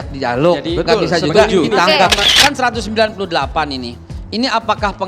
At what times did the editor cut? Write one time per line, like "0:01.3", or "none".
0:02.2